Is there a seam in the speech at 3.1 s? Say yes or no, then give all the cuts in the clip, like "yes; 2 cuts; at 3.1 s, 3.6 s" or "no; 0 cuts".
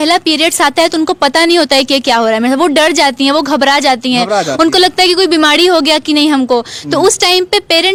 no; 0 cuts